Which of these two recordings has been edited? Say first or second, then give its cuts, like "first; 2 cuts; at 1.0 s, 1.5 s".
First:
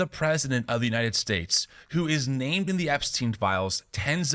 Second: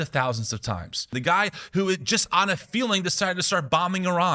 second; 1 cut; at 1.1 s